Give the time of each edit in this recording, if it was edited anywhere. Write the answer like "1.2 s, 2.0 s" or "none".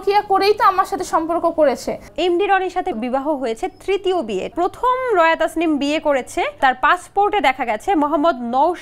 2.1 s, 3.0 s, 4.5 s, 6.6 s